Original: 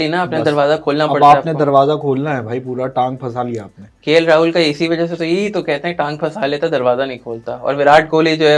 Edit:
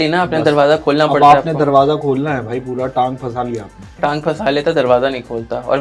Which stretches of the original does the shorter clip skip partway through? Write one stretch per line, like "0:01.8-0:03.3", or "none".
0:03.9-0:05.9